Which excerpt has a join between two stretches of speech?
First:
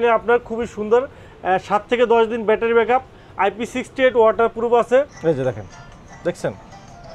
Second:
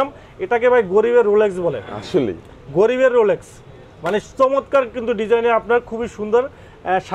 first; 1 cut; at 5.1 s

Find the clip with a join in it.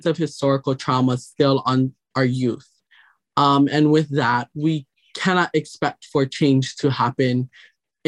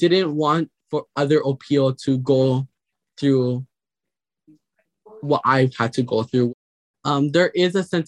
second; 1 cut; at 6.5 s

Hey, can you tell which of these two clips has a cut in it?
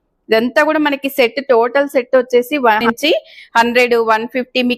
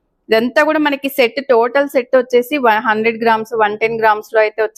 first; 1 cut; at 2.8 s

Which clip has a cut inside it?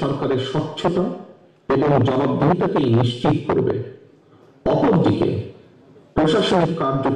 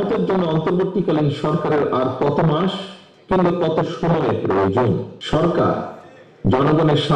second; 1 cut; at 5.1 s

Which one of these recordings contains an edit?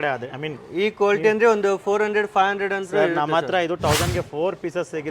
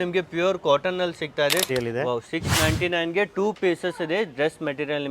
second; 1 cut; at 1.7 s

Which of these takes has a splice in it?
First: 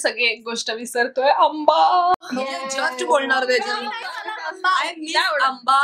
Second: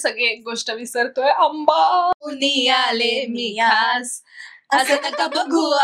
second; 1 cut; at 2.2 s

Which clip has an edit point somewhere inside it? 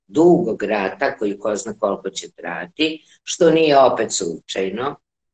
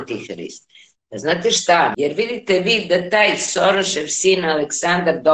second; 1 cut; at 1.9 s

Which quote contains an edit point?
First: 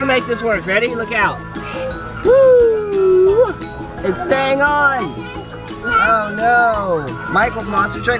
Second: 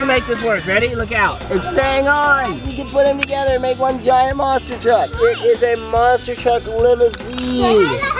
second; 3 cuts; at 1.4 s, 2.7 s, 5.1 s

